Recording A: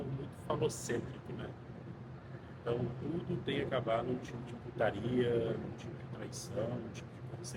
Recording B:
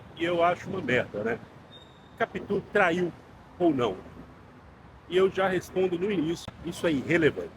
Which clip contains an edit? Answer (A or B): B